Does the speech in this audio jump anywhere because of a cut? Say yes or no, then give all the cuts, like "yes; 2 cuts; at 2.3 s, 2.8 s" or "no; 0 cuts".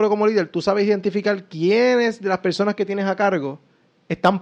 no; 0 cuts